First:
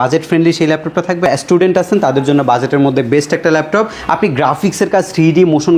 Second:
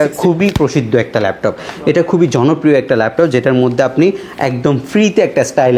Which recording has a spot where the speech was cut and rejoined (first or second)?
first